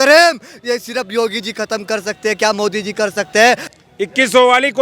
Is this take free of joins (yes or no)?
no